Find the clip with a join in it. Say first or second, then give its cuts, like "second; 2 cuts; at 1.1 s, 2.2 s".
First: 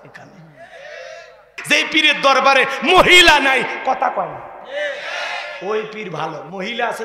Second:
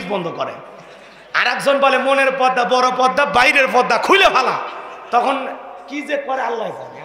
first; 1 cut; at 1.6 s